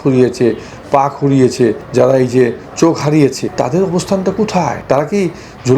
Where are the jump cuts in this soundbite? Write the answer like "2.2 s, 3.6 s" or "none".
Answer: 1.8 s, 3.5 s, 4.8 s